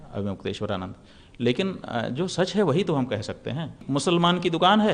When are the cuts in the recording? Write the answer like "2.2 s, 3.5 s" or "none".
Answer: 3.8 s